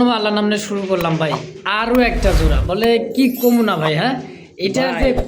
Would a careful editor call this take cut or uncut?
uncut